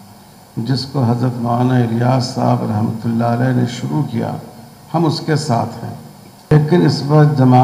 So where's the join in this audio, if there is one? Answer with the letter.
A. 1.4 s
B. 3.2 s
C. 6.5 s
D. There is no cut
C